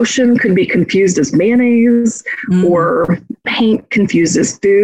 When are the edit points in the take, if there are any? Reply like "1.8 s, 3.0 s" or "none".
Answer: 3.4 s